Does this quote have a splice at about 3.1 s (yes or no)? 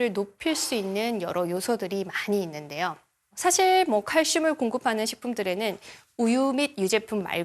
yes